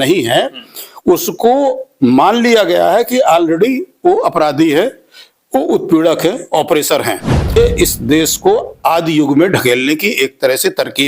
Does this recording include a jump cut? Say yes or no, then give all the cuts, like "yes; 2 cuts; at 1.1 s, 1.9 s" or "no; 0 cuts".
yes; 1 cut; at 7.6 s